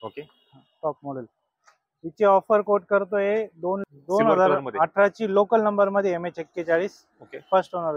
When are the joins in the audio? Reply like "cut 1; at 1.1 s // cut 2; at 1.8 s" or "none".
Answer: cut 1; at 3.8 s